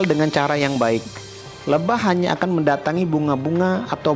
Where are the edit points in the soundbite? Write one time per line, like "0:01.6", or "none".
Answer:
none